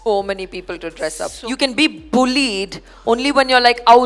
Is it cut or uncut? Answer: cut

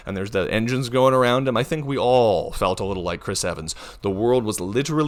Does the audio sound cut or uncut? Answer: uncut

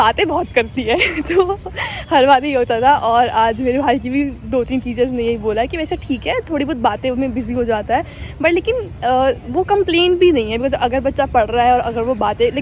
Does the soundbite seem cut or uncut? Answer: uncut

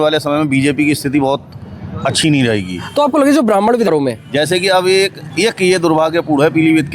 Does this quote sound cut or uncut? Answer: cut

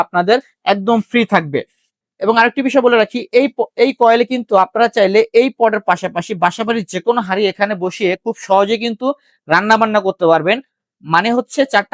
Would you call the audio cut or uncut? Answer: uncut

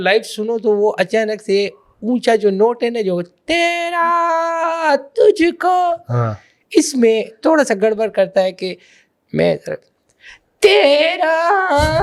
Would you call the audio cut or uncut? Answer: uncut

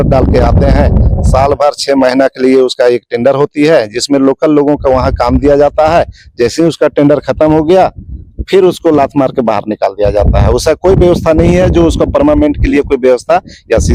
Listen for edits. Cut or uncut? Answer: uncut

